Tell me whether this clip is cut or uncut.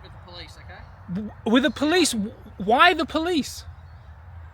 uncut